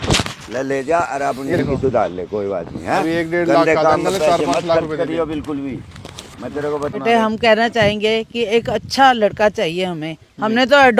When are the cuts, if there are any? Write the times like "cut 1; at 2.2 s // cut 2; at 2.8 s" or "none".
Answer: cut 1; at 1.5 s // cut 2; at 6.9 s